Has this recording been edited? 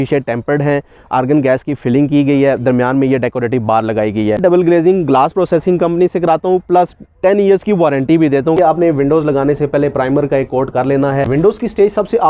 yes; 3 cuts; at 4.4 s, 8.6 s, 11.3 s

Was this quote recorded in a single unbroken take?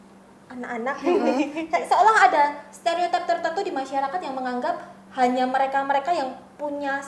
yes; 0 cuts

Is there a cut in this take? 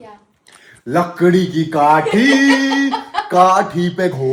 no; 0 cuts

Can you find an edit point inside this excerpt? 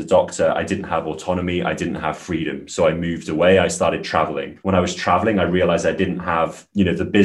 no; 0 cuts

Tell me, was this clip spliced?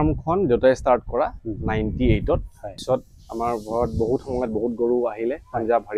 yes; 1 cut; at 2.8 s

